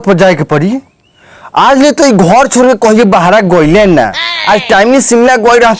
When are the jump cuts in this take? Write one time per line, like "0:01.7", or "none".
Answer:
none